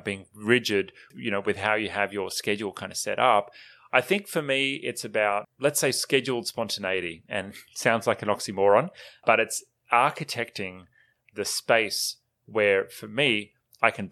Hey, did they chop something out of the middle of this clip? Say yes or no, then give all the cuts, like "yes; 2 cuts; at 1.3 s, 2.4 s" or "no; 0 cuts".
yes; 2 cuts; at 1.1 s, 5.5 s